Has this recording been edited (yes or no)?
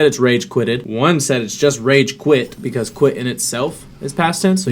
yes